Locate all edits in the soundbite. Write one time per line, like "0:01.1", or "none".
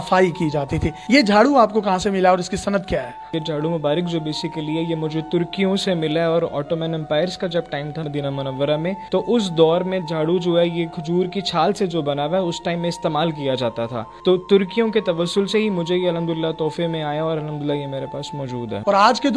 none